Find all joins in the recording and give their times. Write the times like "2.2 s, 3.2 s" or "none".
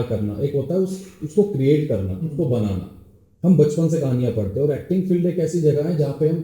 none